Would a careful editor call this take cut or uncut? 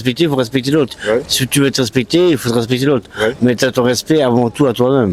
uncut